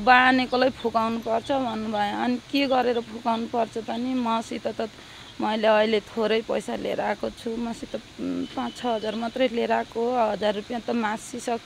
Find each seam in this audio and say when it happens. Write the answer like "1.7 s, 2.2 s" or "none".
none